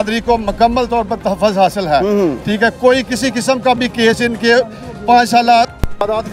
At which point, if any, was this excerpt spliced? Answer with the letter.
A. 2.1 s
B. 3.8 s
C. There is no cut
C